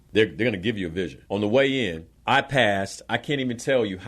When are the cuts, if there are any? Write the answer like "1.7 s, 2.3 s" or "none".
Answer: 1.2 s, 2.1 s